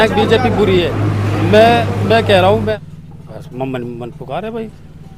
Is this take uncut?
no; 1 cut; at 2.7 s

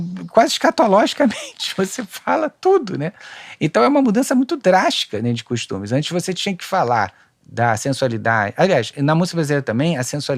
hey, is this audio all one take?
yes; 0 cuts

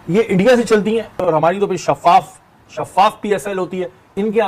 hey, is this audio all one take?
yes; 0 cuts

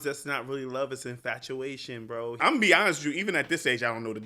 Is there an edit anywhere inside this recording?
yes; 1 cut; at 2.3 s

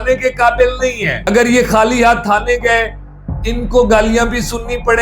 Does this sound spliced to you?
yes; 1 cut; at 1.1 s

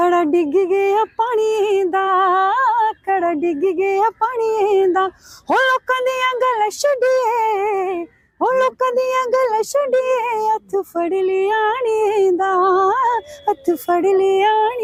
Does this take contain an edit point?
no; 0 cuts

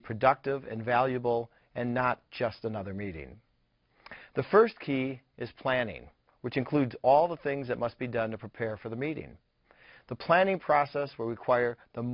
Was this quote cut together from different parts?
no; 0 cuts

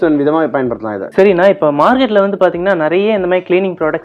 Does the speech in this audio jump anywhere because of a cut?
yes; 1 cut; at 1.0 s

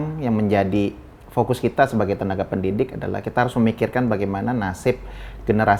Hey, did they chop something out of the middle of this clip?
no; 0 cuts

